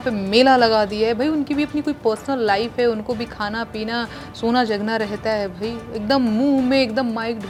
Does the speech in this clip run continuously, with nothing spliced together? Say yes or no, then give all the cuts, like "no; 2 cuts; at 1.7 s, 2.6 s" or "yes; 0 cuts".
yes; 0 cuts